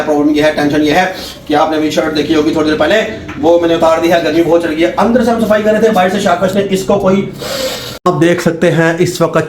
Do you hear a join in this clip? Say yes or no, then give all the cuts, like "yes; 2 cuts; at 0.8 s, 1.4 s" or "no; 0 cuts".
yes; 1 cut; at 8.1 s